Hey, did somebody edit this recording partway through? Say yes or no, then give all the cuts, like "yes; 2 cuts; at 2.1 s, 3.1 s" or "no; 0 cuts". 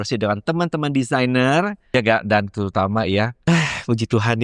yes; 2 cuts; at 1.8 s, 3.4 s